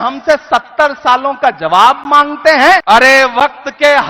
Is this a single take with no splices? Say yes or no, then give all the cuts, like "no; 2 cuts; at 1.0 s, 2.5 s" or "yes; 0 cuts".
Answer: no; 1 cut; at 2.8 s